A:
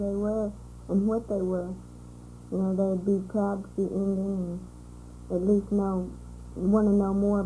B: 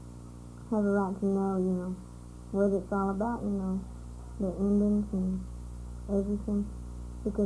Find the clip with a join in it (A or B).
B